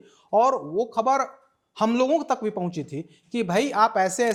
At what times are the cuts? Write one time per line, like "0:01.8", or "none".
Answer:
none